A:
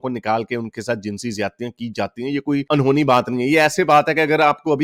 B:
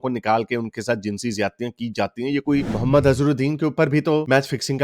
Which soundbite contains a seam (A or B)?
B